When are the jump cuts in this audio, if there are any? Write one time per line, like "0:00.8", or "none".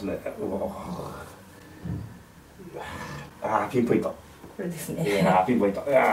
none